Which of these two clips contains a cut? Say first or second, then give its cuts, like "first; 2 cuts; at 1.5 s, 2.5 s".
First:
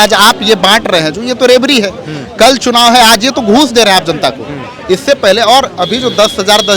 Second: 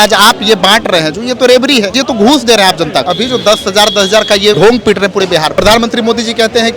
second; 4 cuts; at 2.0 s, 3.1 s, 4.6 s, 5.5 s